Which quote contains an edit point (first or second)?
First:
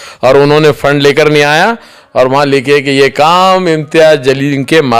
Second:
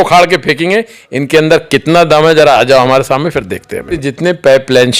second